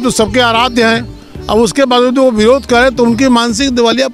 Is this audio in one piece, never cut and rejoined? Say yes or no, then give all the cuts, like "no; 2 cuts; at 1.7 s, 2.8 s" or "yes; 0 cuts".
yes; 0 cuts